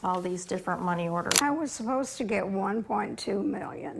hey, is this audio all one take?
no; 1 cut; at 1.3 s

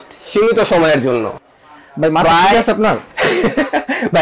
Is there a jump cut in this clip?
yes; 2 cuts; at 1.5 s, 3.1 s

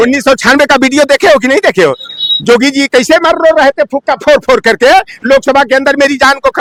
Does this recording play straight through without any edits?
yes; 0 cuts

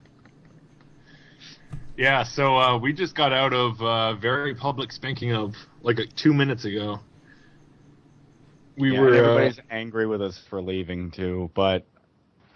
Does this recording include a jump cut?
yes; 1 cut; at 4.0 s

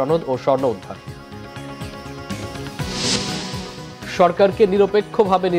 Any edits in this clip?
no; 0 cuts

